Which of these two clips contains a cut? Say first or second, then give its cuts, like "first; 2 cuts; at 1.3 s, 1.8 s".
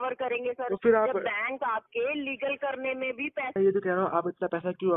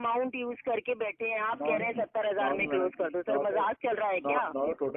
first; 1 cut; at 3.5 s